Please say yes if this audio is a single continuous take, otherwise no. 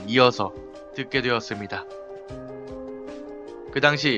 no